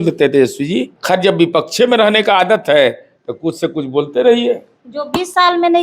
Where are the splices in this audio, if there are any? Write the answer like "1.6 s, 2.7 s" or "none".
0.9 s